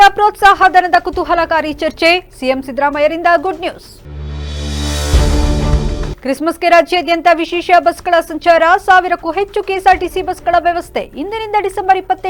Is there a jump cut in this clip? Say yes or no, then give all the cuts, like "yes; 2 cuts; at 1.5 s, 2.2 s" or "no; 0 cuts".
no; 0 cuts